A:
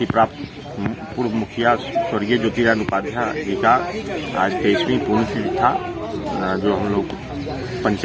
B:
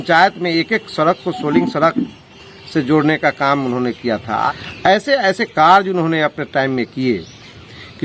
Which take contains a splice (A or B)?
B